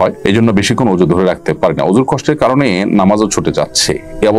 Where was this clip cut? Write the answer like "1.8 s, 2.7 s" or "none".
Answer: none